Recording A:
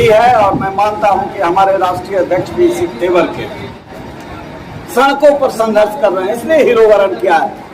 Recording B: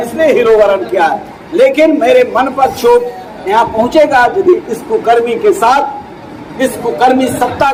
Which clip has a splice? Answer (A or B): A